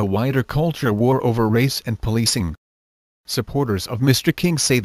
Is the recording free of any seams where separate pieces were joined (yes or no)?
no